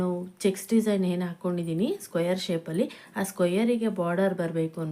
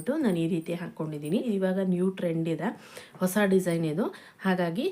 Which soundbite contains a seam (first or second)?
second